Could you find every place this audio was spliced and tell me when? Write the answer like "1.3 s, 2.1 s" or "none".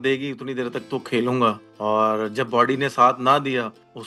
none